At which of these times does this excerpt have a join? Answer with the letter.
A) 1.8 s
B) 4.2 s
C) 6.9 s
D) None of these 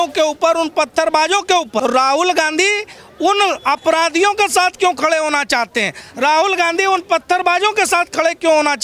A